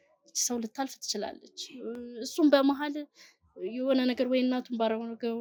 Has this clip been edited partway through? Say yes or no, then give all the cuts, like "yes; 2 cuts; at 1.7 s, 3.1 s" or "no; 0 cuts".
no; 0 cuts